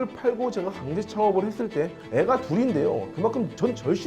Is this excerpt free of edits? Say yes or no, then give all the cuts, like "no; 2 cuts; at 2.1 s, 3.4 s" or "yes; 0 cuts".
no; 1 cut; at 3.1 s